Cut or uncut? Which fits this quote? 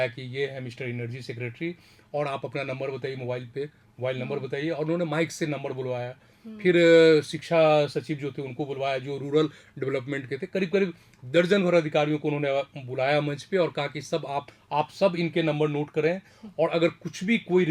uncut